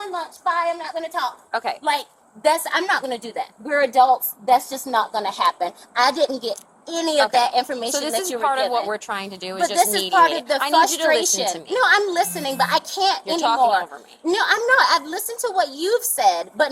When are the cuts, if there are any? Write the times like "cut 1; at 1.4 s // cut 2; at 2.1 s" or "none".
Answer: none